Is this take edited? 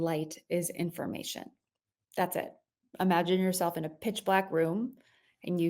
yes; 1 cut; at 2.8 s

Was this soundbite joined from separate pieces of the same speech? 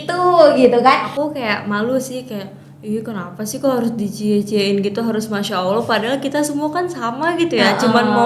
yes; 1 cut; at 1.1 s

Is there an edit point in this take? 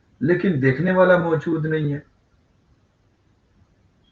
no; 0 cuts

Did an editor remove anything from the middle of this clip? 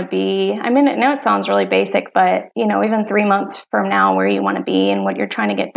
yes; 1 cut; at 2.5 s

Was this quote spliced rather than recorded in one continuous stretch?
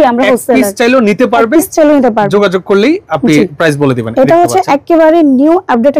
no; 0 cuts

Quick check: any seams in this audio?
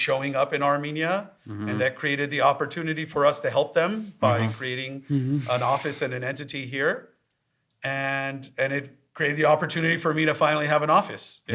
no; 0 cuts

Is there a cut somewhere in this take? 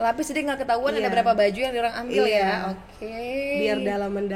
no; 0 cuts

